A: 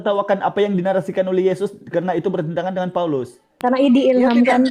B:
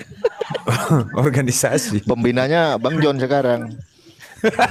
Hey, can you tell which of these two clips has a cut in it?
A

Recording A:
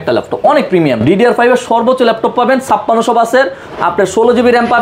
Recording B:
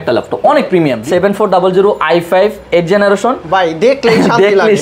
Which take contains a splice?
B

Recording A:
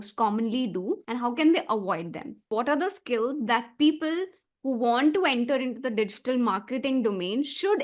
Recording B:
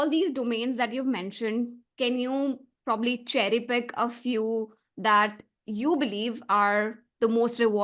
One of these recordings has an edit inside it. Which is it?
A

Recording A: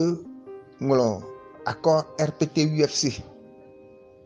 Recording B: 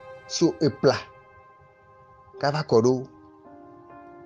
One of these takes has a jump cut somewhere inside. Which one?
B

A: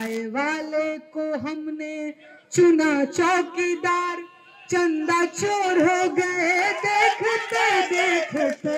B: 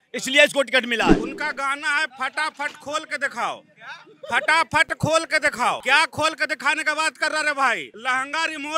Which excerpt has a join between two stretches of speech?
B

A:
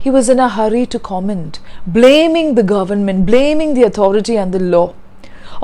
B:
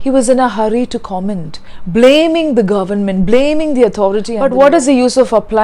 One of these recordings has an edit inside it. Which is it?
B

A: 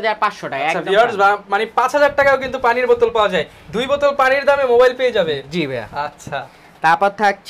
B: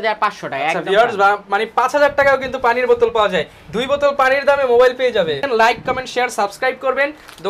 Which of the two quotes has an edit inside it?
B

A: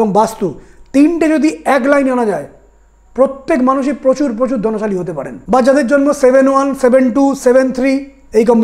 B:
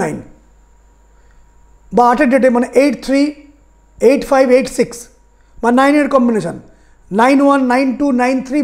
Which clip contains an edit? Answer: A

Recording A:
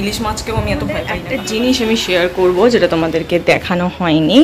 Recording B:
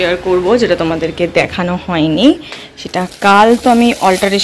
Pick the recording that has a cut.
A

